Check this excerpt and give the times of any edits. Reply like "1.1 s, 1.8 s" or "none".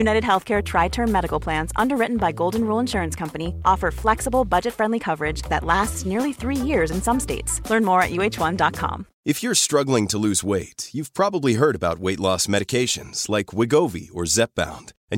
9.1 s